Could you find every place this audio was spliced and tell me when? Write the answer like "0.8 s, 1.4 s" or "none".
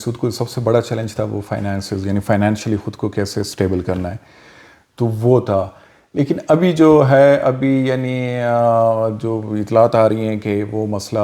none